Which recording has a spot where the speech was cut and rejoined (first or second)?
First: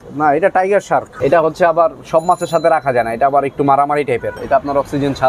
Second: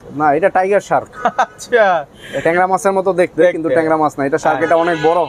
first